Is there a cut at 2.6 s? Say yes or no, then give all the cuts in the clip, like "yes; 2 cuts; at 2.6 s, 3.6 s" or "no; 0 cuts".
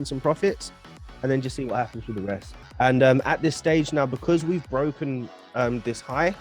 yes; 1 cut; at 2.6 s